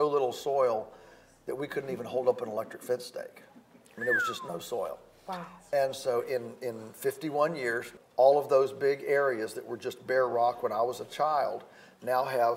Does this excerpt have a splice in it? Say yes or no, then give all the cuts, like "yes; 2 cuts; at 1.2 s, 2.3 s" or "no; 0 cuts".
yes; 1 cut; at 7.9 s